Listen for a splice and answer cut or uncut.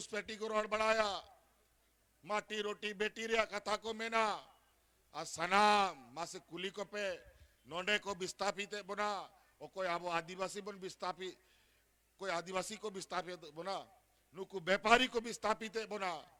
uncut